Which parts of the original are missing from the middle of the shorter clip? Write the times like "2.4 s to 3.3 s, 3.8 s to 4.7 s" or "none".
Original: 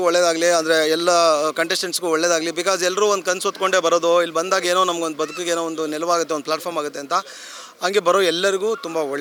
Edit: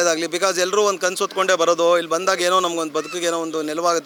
none